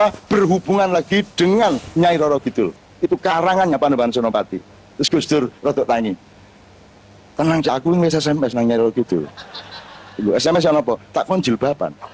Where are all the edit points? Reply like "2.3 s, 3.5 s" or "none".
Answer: none